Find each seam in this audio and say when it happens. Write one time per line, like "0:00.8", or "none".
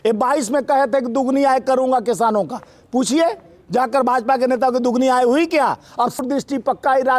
0:06.2